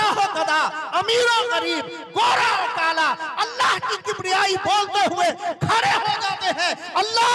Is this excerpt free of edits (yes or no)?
yes